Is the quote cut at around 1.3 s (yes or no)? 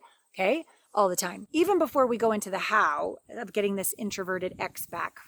yes